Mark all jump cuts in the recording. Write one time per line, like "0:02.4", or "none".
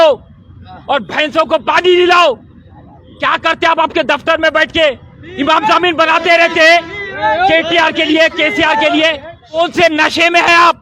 0:09.6